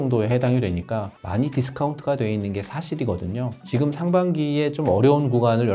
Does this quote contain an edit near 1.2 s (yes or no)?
yes